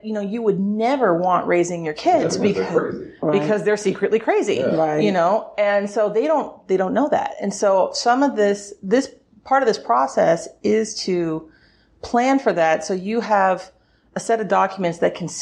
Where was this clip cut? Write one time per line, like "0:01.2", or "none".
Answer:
none